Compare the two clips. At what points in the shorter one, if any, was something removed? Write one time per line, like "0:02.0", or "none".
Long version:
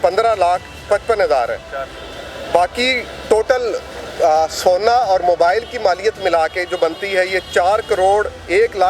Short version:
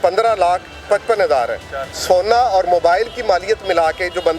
0:02.0